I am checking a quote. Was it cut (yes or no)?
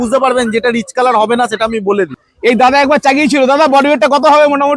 yes